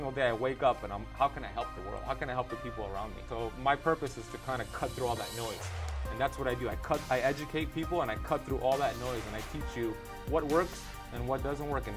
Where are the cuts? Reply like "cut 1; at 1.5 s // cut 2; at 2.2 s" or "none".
cut 1; at 3.2 s